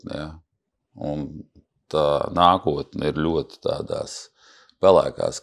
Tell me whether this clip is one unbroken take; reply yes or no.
yes